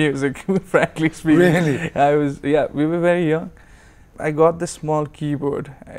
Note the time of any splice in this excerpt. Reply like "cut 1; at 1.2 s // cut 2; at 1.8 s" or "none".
cut 1; at 4.1 s